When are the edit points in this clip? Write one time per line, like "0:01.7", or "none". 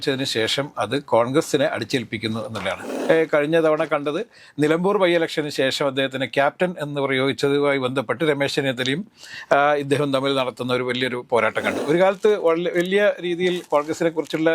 0:02.8
0:11.7